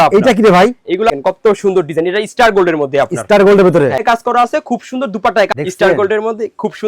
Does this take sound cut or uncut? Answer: cut